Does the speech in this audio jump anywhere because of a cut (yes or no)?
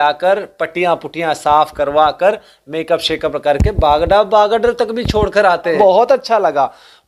yes